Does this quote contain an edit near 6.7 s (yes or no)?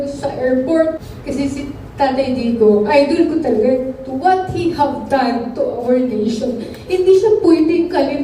no